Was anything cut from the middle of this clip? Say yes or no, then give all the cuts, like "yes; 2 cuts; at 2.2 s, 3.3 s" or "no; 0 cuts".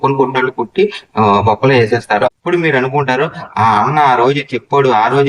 yes; 1 cut; at 2.4 s